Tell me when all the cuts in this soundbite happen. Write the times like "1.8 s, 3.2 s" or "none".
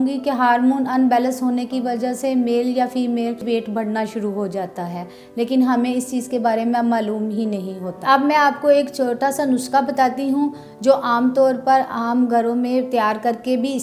3.4 s, 7.9 s

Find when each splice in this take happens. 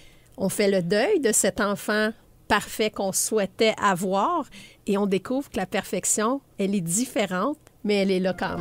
6.5 s, 7.7 s

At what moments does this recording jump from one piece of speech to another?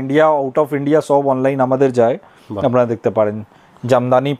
none

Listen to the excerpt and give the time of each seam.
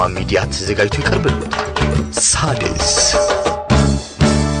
none

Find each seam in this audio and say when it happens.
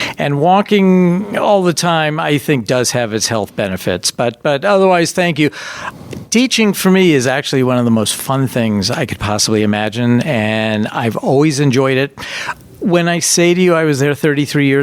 none

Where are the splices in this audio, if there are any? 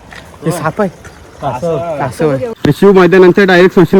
2.5 s

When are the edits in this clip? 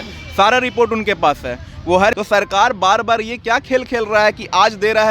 2.2 s

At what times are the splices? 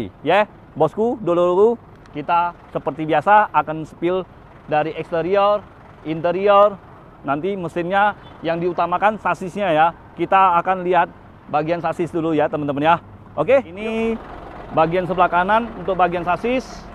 13.8 s

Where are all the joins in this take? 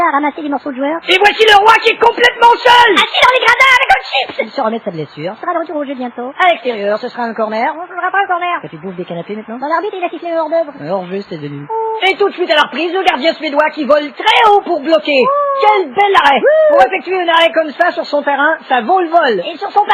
none

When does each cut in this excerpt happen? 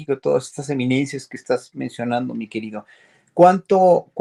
none

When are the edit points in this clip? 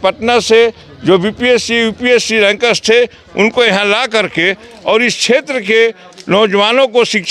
none

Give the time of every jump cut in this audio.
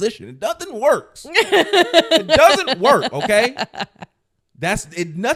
none

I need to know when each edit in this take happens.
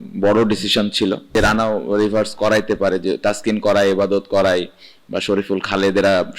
1.3 s

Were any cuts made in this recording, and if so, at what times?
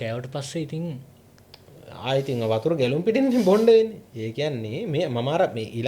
none

